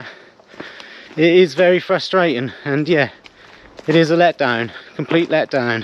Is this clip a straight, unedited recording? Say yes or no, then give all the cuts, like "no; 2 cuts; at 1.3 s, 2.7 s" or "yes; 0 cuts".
yes; 0 cuts